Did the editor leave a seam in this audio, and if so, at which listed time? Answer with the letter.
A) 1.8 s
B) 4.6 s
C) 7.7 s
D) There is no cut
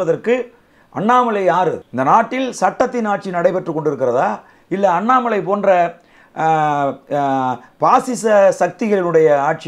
A